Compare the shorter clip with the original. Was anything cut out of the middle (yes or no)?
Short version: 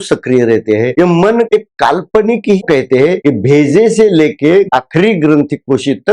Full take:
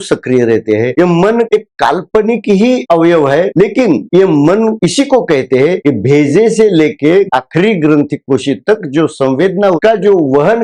yes